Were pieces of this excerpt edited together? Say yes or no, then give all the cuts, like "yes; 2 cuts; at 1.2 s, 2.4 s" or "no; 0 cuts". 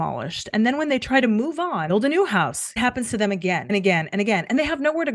yes; 2 cuts; at 2.8 s, 3.7 s